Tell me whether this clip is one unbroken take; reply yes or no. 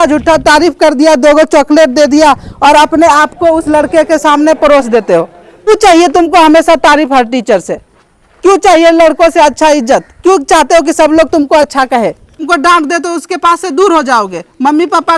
no